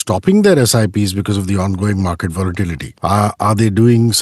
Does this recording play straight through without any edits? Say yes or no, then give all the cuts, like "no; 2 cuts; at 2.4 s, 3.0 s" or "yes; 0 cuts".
no; 1 cut; at 2.8 s